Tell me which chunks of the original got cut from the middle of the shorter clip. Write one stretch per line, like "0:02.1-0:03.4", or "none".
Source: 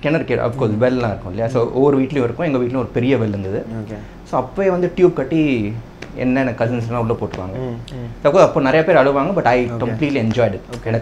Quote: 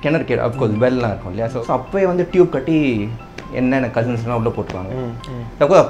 0:01.5-0:04.2